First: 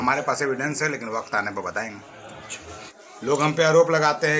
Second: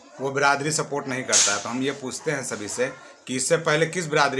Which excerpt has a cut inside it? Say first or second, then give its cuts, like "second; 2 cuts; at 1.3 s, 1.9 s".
first; 1 cut; at 2.9 s